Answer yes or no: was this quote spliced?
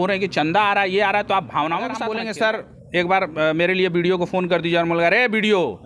yes